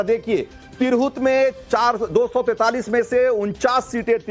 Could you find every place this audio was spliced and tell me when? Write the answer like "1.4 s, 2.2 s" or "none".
2.6 s

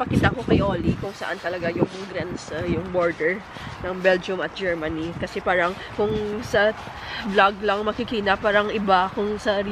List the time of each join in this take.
none

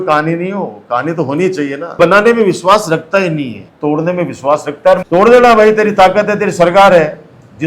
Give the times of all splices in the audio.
1.9 s, 3.6 s, 5.0 s

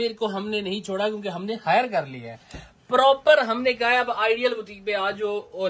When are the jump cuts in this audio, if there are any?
none

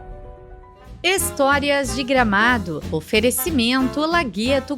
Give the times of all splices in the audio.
1.0 s

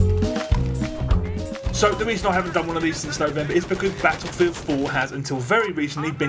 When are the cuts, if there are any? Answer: 3.5 s

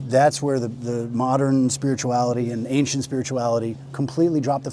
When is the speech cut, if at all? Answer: none

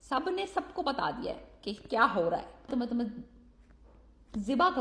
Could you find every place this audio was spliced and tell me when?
2.7 s

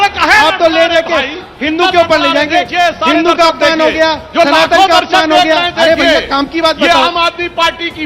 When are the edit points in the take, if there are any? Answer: none

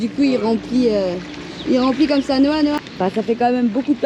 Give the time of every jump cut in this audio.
2.9 s

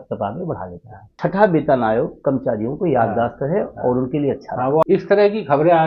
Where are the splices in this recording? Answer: 1.1 s, 4.8 s

